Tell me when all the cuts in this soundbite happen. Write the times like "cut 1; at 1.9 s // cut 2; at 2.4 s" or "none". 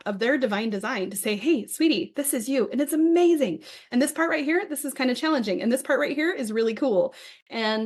none